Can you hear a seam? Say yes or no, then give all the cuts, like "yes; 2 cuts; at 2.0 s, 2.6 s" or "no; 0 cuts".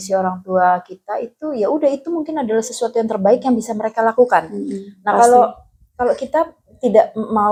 no; 0 cuts